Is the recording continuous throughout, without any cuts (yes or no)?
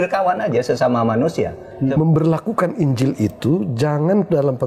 no